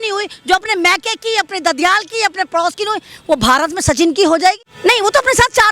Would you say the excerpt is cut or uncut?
cut